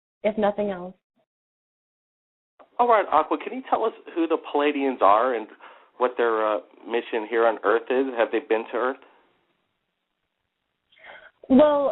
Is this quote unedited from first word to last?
yes; 0 cuts

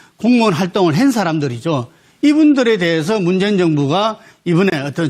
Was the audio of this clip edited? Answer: no; 0 cuts

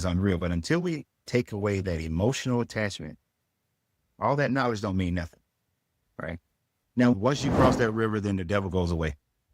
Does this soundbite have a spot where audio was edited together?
yes; 1 cut; at 7.1 s

